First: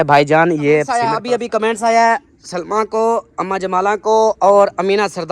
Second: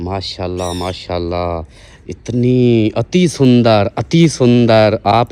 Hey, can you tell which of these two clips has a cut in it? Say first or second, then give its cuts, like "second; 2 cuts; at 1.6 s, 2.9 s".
first; 1 cut; at 1.0 s